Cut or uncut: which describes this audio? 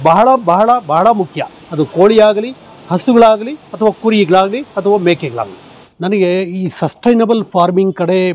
uncut